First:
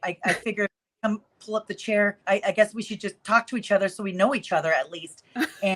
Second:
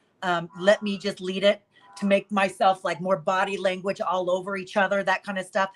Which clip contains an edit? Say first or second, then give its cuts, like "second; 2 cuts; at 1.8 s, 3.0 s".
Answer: first; 1 cut; at 2.2 s